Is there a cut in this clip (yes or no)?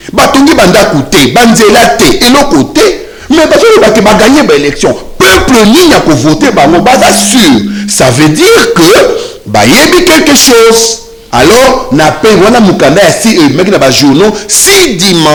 no